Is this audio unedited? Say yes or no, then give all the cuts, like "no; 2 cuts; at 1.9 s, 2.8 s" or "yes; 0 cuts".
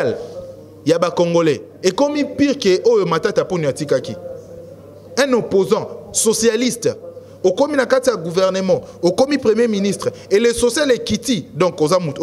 yes; 0 cuts